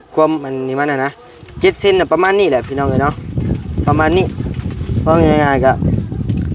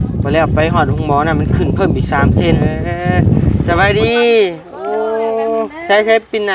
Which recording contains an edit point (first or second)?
second